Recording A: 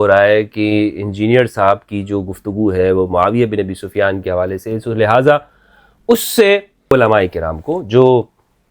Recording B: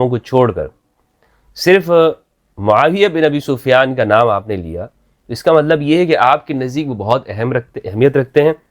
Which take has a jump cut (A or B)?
A